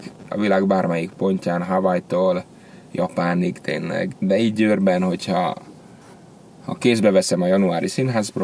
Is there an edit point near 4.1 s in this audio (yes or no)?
yes